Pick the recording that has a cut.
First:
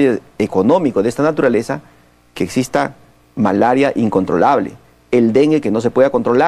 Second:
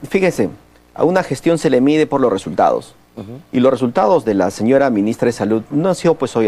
second; 1 cut; at 3.6 s

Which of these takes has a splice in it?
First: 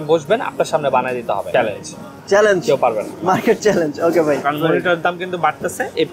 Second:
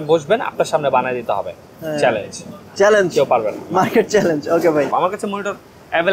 first; 2 cuts; at 1.5 s, 4.4 s

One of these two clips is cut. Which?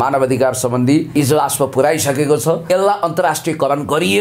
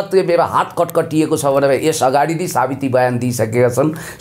first; 2 cuts; at 1.2 s, 2.6 s

